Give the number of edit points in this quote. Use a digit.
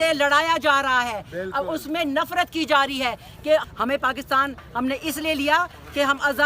1